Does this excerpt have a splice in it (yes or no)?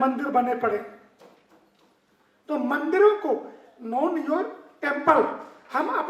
no